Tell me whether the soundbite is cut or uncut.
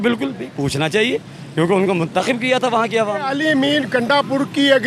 cut